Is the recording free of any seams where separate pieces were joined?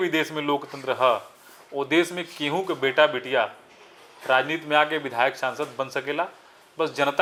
yes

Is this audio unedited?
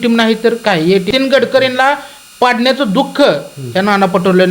no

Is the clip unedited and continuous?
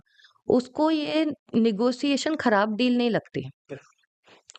yes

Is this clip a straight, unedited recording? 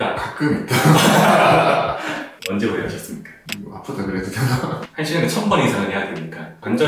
no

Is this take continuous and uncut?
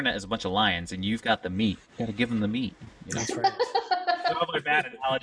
yes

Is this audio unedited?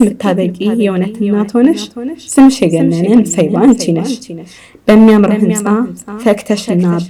yes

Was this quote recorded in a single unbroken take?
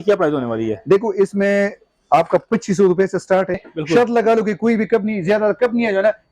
no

